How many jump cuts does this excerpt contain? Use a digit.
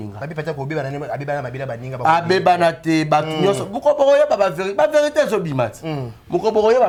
0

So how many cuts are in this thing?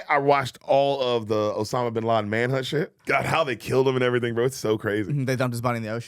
1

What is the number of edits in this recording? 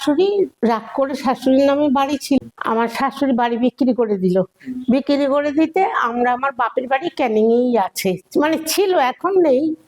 1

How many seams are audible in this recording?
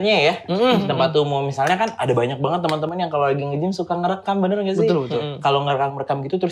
0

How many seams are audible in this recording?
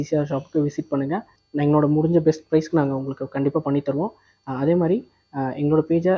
0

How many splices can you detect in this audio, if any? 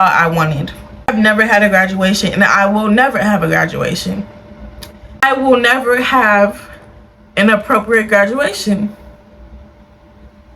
2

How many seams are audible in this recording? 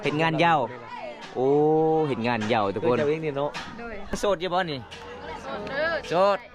1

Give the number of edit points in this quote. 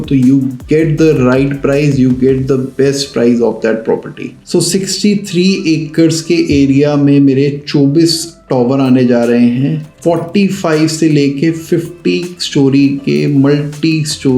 1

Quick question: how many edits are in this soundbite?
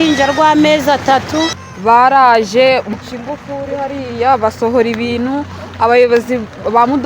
2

